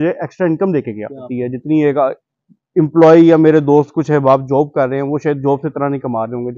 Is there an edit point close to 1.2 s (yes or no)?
yes